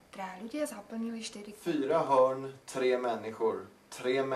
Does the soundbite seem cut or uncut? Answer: cut